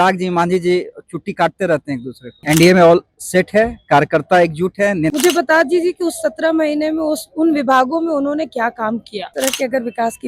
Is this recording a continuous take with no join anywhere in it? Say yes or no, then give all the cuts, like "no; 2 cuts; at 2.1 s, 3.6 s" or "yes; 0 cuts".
no; 3 cuts; at 2.3 s, 5.1 s, 9.3 s